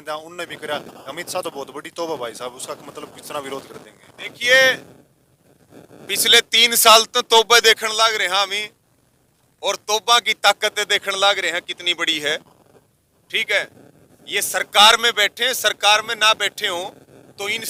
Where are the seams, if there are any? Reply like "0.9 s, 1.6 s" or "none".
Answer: none